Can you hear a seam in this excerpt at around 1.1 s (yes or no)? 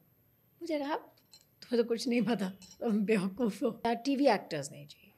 no